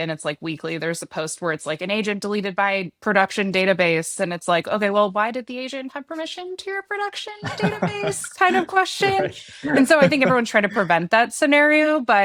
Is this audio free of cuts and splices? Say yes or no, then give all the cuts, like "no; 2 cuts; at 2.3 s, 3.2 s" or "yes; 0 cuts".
yes; 0 cuts